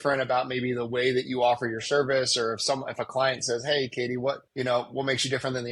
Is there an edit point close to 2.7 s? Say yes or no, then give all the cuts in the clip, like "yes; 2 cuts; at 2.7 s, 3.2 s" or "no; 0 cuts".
no; 1 cut; at 4.5 s